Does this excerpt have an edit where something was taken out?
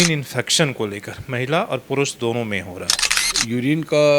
yes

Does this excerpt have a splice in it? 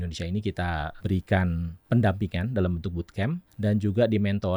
yes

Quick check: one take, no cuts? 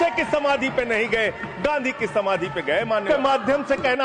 no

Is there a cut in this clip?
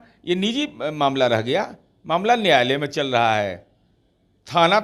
no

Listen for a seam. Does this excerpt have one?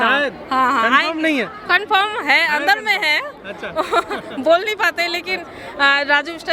no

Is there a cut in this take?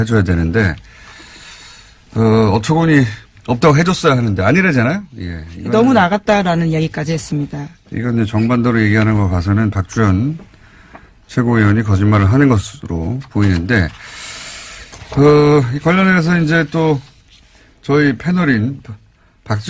yes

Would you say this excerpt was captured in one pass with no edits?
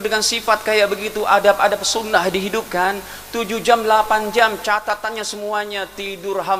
yes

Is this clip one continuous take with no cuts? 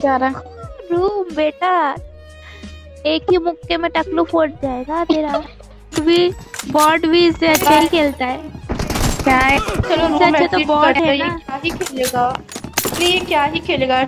no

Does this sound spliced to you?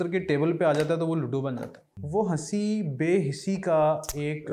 yes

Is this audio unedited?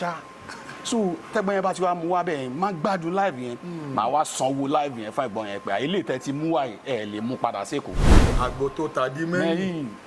no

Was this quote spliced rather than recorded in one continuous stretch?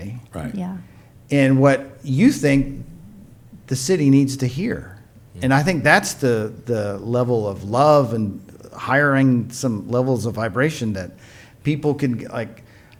no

